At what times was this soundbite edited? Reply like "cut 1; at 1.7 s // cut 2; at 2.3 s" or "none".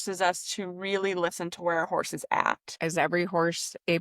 cut 1; at 2.8 s

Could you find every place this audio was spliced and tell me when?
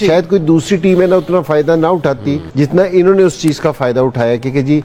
none

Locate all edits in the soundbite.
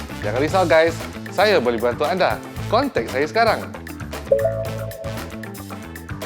cut 1; at 5.1 s

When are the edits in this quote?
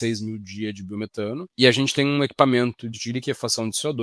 cut 1; at 1.5 s // cut 2; at 3.0 s

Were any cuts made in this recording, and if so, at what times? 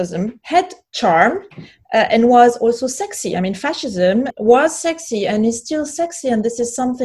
cut 1; at 4.3 s

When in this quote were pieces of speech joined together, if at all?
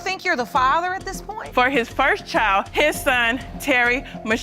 cut 1; at 1.4 s

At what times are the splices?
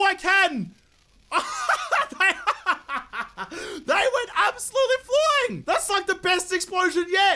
cut 1; at 5.6 s

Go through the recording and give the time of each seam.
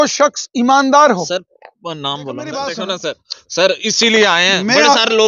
cut 1; at 2.4 s

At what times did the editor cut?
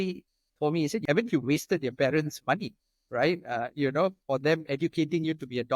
cut 1; at 1.0 s

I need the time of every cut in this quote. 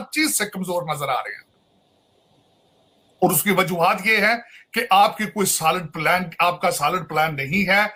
none

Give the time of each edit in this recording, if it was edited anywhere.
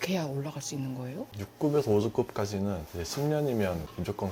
cut 1; at 1.3 s

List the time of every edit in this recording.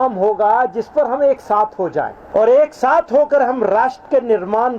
cut 1; at 2.2 s

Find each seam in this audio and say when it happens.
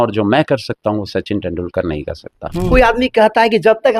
cut 1; at 2.7 s

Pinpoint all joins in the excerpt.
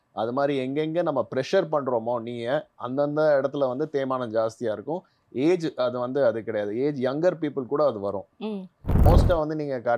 cut 1; at 8.9 s

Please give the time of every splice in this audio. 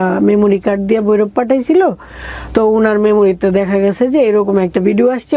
none

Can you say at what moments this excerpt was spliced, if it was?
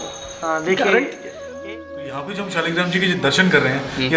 cut 1; at 1.5 s

